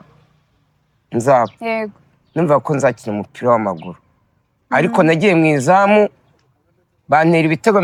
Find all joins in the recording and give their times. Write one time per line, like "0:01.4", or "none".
none